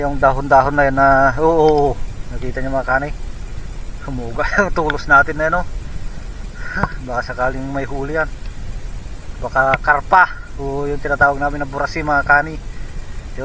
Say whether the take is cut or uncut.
uncut